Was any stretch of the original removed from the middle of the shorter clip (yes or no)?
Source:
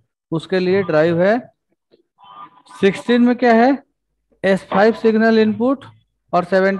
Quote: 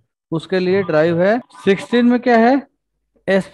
yes